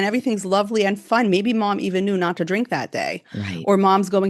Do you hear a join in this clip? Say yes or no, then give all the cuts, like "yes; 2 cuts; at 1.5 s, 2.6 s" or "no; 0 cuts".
yes; 1 cut; at 1.0 s